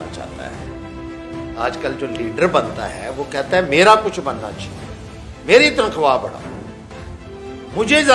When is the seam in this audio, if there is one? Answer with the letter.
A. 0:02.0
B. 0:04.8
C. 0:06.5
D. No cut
A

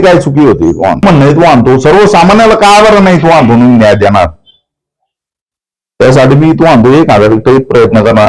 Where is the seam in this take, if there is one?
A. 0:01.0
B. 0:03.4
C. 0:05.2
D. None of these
A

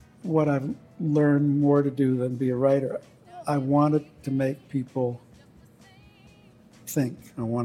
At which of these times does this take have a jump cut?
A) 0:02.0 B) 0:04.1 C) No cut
C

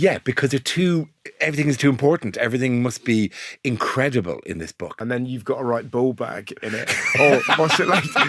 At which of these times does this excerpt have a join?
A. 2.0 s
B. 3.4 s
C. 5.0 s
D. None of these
C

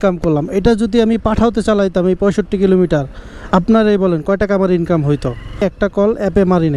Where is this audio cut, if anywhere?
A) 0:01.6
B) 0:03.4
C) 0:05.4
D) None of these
D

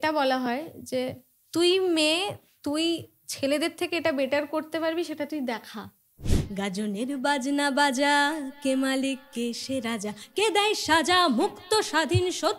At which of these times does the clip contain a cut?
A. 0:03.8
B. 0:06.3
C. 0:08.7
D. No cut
B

